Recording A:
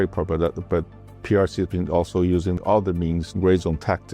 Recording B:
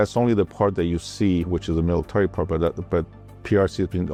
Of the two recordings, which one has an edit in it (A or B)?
A